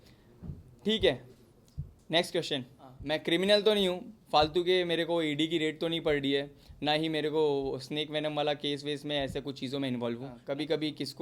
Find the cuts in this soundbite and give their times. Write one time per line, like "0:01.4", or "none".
0:03.0
0:10.4